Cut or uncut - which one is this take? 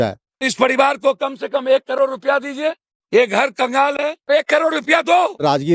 uncut